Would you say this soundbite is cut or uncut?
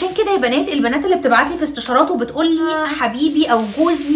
cut